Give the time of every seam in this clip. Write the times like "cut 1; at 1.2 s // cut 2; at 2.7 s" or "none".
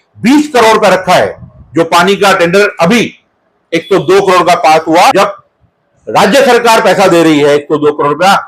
cut 1; at 5.1 s